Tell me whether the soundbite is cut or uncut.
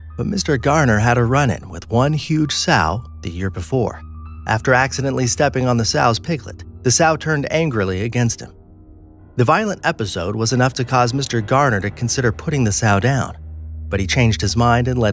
uncut